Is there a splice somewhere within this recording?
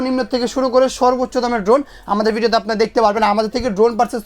no; 0 cuts

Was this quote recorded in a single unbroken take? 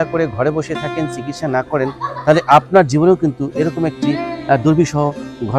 yes; 0 cuts

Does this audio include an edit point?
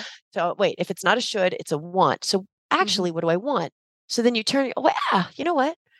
no; 0 cuts

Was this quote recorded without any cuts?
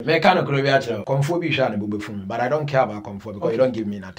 no; 1 cut; at 1.0 s

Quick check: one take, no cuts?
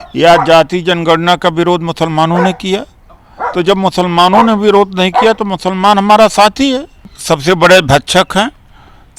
no; 1 cut; at 7.1 s

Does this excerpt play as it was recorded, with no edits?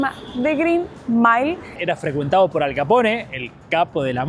no; 1 cut; at 1.8 s

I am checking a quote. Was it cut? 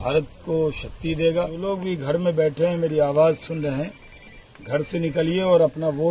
yes; 1 cut; at 1.6 s

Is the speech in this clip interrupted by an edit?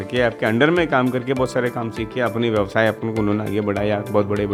no; 0 cuts

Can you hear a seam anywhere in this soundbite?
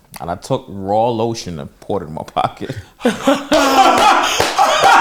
no; 0 cuts

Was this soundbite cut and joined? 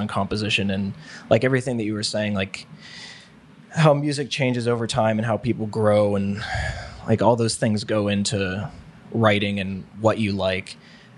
no; 0 cuts

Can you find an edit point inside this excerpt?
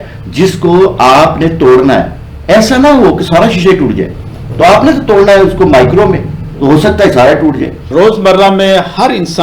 yes; 1 cut; at 7.8 s

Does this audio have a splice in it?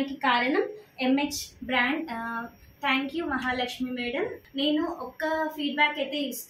yes; 1 cut; at 4.4 s

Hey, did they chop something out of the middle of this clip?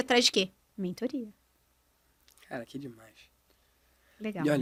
no; 0 cuts

